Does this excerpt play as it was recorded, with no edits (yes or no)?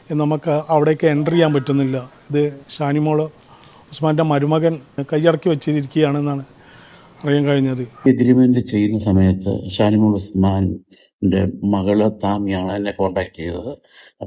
no